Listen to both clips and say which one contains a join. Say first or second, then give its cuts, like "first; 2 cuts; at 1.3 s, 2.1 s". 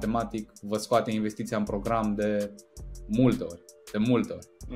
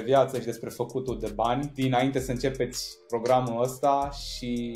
second; 1 cut; at 1.7 s